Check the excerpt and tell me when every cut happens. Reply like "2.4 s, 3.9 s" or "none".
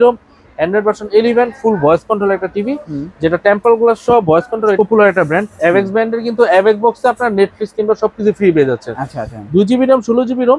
4.8 s

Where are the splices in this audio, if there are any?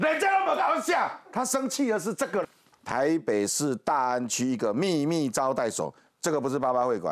2.6 s

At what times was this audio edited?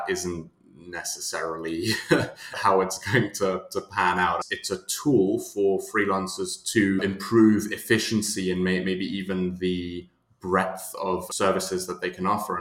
2.5 s, 4.5 s, 7.0 s, 11.3 s

